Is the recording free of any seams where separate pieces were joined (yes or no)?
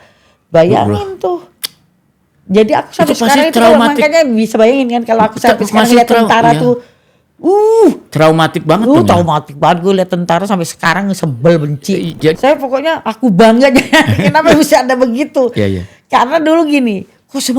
no